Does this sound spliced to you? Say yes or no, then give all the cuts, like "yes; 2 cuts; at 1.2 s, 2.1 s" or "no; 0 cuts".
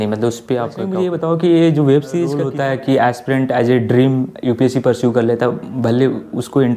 yes; 2 cuts; at 0.9 s, 2.4 s